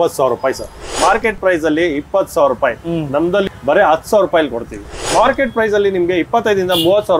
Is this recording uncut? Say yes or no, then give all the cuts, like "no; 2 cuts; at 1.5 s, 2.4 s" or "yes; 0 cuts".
no; 3 cuts; at 0.9 s, 3.4 s, 4.9 s